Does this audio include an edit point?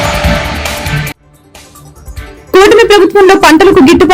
yes; 1 cut; at 2.4 s

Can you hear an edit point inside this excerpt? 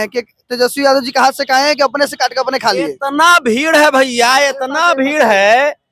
no; 0 cuts

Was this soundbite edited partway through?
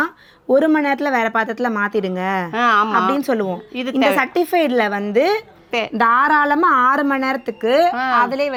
no; 0 cuts

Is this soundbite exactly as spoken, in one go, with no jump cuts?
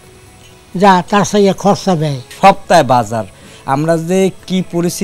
no; 1 cut; at 2.3 s

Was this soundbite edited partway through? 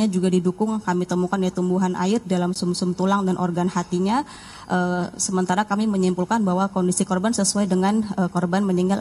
no; 0 cuts

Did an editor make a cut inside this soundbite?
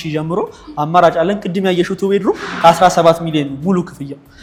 no; 0 cuts

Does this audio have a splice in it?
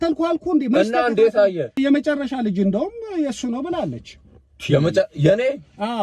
yes; 1 cut; at 1.8 s

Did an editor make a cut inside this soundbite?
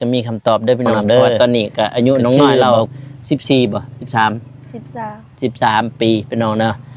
yes; 1 cut; at 1.4 s

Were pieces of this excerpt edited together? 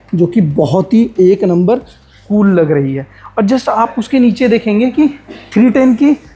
no; 0 cuts

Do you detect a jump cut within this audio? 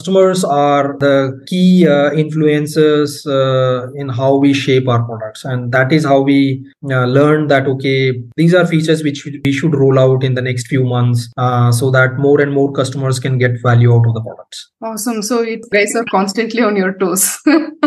no; 0 cuts

